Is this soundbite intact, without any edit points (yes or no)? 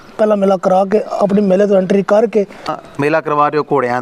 no